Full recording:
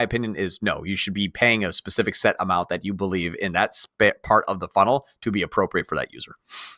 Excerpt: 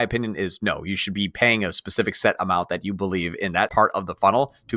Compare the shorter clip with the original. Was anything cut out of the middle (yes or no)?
yes